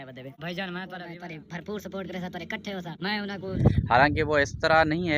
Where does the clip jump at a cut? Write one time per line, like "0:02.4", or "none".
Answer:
0:01.1